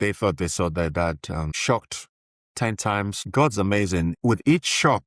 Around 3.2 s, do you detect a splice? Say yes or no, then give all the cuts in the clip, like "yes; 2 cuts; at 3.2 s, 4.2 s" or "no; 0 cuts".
yes; 3 cuts; at 1.6 s, 3.2 s, 4.2 s